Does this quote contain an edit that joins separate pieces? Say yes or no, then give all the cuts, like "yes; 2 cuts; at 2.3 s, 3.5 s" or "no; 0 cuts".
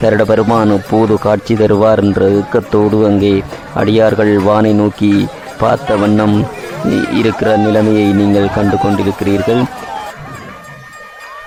no; 0 cuts